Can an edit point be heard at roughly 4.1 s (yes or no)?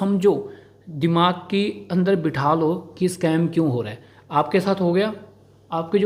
no